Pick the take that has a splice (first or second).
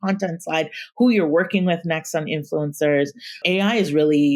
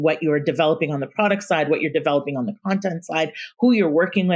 first